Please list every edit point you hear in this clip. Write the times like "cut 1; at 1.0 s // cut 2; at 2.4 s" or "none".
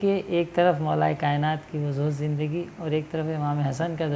none